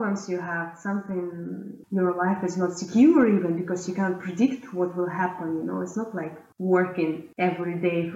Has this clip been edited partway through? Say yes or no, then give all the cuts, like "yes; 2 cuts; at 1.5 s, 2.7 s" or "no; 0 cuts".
yes; 2 cuts; at 6.4 s, 7.3 s